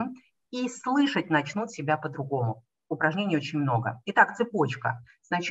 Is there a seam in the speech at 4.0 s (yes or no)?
no